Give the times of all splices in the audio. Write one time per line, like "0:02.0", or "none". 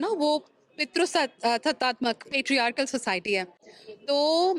none

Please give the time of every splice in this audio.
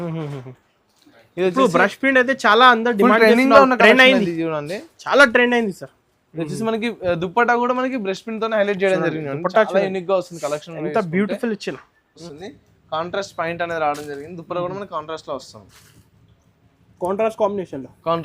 0:12.2

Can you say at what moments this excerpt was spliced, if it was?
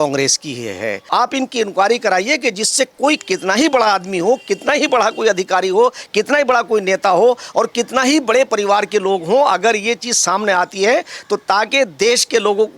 0:01.0

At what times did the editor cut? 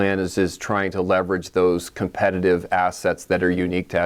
none

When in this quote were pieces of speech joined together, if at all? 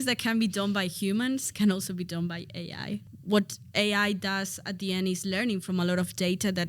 0:03.1

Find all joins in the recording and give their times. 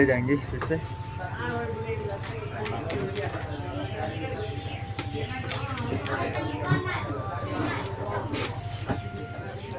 none

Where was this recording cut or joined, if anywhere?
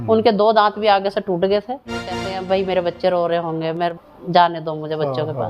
0:02.3
0:03.9

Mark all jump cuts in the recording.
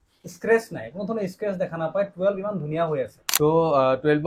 0:03.2

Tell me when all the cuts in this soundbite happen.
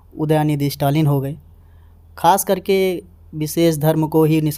none

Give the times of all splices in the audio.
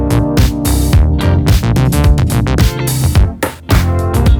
none

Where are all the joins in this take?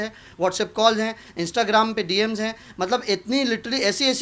none

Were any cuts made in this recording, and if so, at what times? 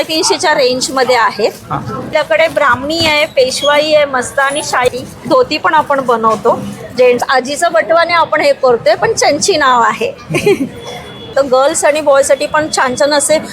0:02.1
0:07.2
0:11.3

